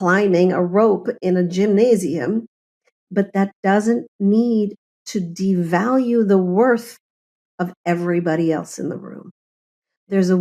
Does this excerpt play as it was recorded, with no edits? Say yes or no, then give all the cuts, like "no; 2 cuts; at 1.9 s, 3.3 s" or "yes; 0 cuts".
yes; 0 cuts